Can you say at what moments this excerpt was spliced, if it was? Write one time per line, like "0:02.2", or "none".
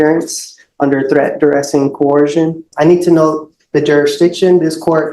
0:02.7